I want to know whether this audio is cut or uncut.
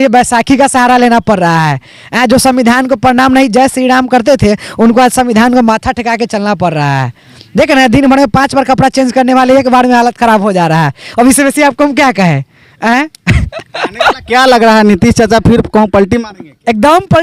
uncut